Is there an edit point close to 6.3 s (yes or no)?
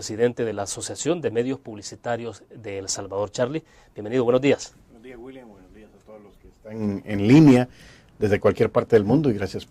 yes